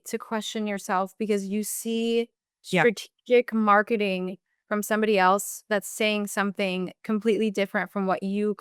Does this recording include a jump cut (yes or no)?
no